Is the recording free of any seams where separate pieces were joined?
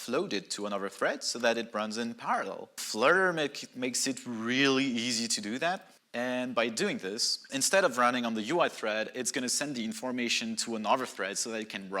no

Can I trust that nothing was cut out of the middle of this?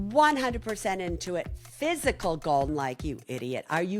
no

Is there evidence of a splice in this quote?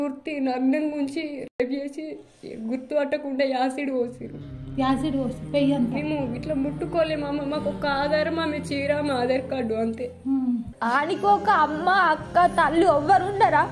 yes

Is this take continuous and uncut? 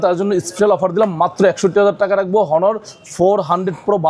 yes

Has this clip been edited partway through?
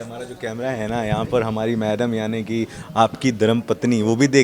no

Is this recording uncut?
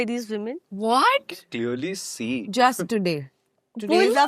yes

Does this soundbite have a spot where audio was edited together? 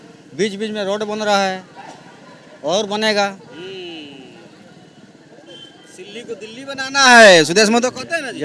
no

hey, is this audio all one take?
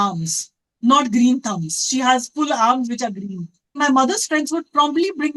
no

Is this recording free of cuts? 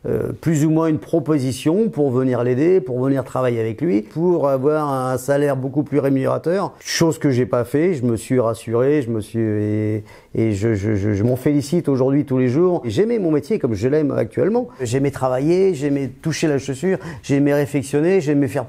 no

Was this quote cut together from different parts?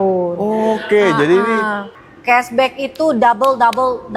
yes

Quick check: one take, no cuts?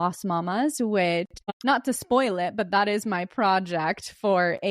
no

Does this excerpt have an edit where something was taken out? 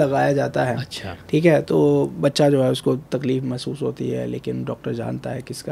no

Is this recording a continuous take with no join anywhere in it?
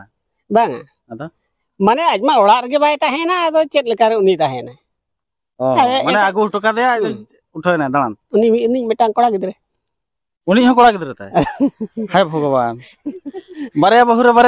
yes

